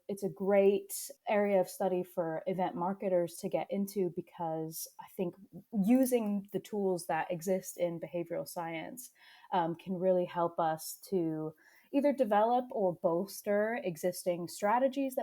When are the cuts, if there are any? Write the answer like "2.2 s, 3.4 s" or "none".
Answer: 1.0 s